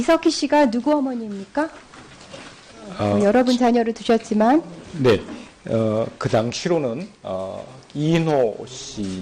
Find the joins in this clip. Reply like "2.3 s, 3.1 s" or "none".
7.0 s